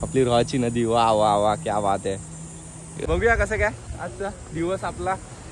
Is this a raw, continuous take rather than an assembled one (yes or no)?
no